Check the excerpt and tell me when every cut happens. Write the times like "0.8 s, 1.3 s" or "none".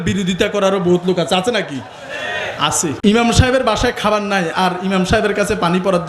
3.0 s